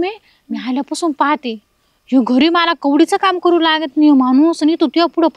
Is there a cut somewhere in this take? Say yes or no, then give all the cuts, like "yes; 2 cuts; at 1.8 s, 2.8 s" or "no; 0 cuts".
no; 0 cuts